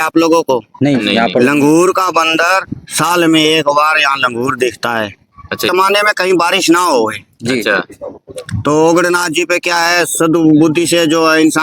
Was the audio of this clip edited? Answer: yes; 1 cut; at 5.7 s

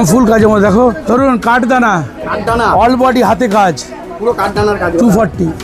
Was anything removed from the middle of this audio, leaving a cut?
yes; 1 cut; at 1.0 s

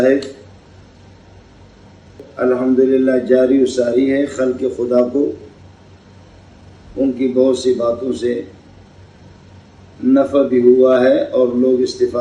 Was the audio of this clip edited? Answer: yes; 1 cut; at 2.2 s

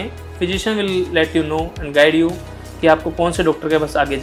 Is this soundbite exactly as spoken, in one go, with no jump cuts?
yes; 0 cuts

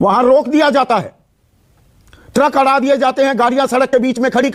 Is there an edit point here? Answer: no; 0 cuts

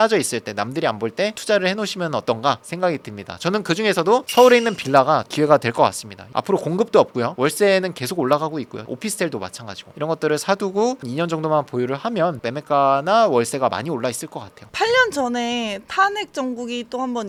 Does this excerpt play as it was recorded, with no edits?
yes; 0 cuts

